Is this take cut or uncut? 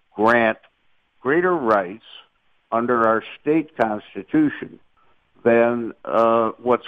uncut